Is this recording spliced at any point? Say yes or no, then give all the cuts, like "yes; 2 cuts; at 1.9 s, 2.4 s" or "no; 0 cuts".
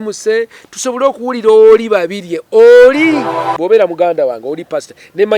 yes; 1 cut; at 3.5 s